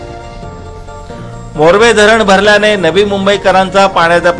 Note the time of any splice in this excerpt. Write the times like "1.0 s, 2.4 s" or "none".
1.2 s